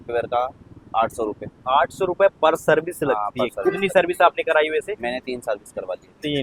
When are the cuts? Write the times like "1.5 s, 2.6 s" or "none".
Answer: none